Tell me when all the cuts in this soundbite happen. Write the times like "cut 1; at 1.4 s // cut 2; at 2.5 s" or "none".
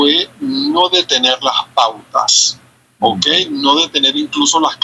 none

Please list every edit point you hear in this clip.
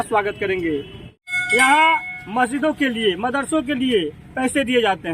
cut 1; at 1.0 s

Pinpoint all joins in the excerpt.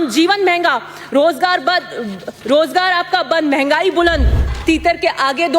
cut 1; at 4.5 s

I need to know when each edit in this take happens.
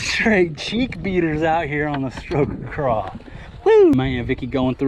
cut 1; at 3.9 s

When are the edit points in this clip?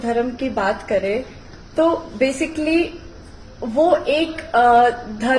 none

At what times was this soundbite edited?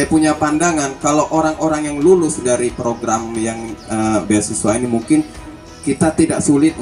none

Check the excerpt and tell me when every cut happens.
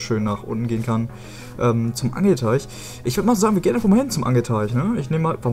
none

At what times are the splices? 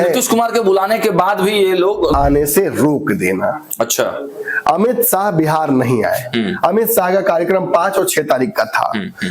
cut 1; at 2.1 s

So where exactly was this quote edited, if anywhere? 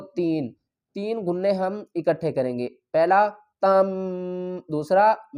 none

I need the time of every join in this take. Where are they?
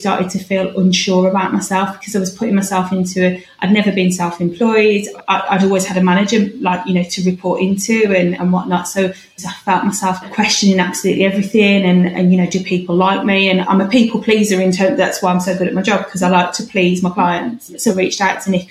cut 1; at 9.4 s // cut 2; at 17.8 s

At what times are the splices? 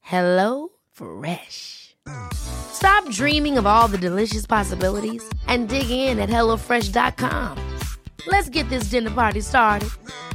none

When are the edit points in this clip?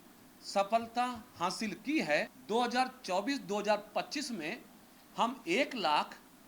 cut 1; at 2.4 s

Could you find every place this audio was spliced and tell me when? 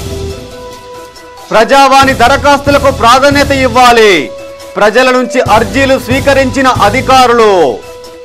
none

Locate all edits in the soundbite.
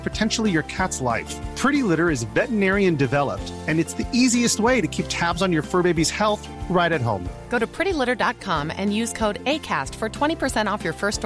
none

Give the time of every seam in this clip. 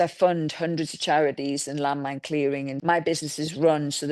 cut 1; at 2.7 s

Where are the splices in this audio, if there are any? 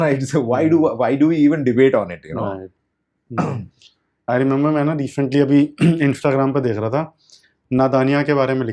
none

